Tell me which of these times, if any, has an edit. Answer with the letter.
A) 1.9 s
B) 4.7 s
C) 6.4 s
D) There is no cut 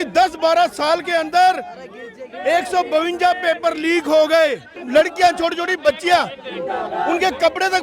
B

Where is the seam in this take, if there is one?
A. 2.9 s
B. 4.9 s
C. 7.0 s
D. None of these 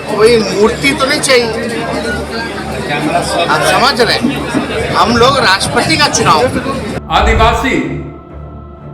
C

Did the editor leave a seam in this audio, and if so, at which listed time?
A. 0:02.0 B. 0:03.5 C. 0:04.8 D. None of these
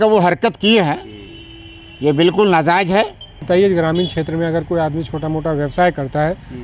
B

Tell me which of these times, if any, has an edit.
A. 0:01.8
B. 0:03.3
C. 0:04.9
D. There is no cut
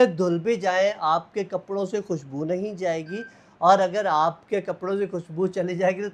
D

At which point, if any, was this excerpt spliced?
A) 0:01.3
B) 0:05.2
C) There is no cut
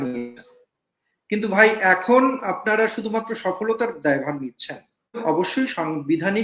B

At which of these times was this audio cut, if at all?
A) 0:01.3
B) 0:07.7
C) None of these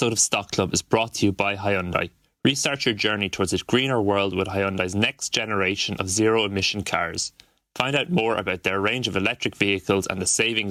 C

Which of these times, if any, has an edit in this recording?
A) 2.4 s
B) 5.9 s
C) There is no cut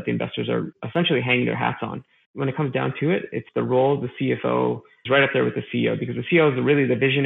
A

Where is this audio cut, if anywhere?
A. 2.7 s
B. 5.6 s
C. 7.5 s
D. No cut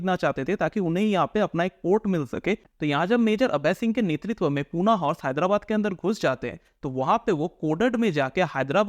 A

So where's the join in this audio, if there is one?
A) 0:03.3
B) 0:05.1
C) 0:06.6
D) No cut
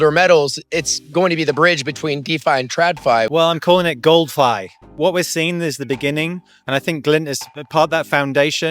A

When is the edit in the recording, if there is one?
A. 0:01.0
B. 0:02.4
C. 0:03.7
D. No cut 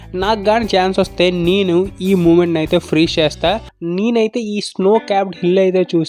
C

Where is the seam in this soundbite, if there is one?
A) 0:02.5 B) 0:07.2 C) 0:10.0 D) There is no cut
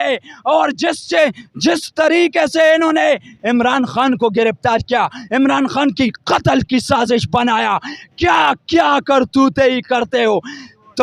D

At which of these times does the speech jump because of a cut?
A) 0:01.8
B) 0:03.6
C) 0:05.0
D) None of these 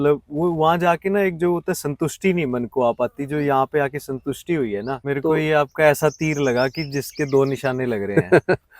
C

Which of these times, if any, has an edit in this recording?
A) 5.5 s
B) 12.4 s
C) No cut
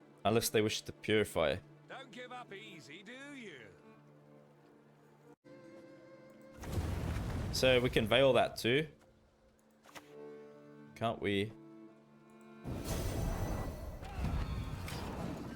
A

